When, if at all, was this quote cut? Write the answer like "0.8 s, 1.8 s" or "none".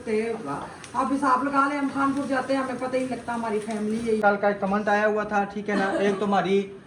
4.2 s